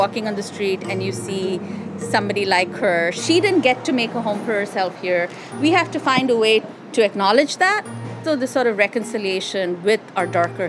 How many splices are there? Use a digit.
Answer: 3